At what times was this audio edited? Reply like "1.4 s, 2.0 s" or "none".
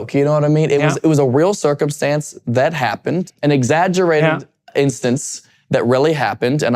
3.3 s

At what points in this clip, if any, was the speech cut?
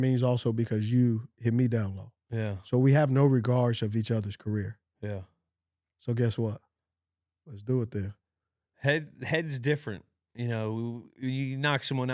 none

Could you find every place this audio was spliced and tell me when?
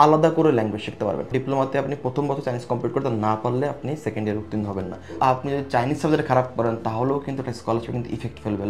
1.3 s, 5.0 s

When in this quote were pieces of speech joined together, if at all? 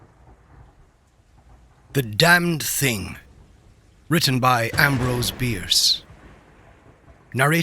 1.4 s

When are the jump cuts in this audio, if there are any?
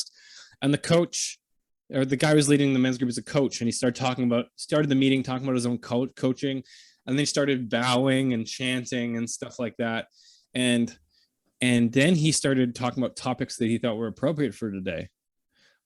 none

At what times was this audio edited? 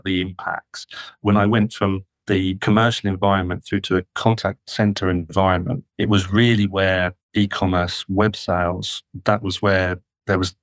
1.2 s, 2.1 s, 4.4 s, 5.8 s, 7.2 s

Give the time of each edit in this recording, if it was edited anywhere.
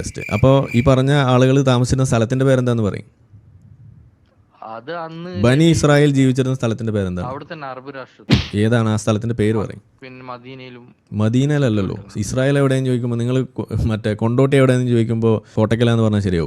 15.5 s

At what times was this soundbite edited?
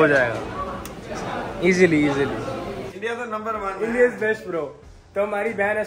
2.9 s

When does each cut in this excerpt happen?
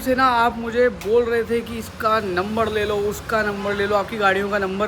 none

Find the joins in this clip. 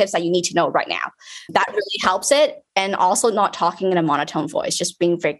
none

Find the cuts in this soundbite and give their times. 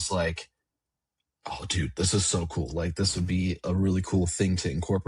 none

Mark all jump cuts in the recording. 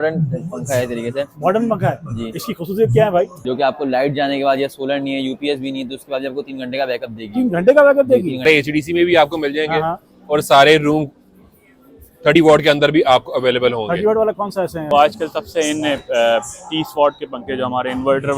3.4 s, 8.5 s, 14.9 s

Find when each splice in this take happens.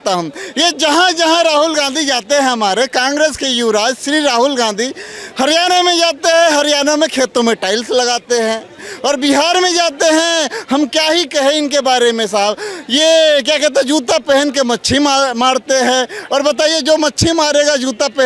none

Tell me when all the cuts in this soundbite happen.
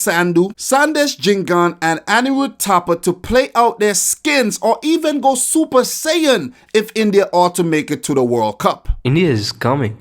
8.9 s

